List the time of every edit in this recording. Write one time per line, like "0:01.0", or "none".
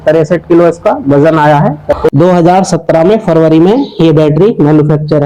0:01.8